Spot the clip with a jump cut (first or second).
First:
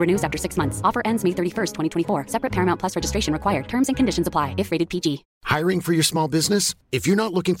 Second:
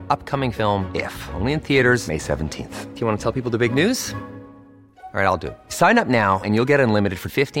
first